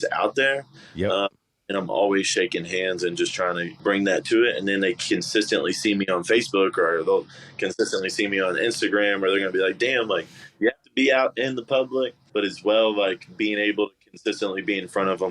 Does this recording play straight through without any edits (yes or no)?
yes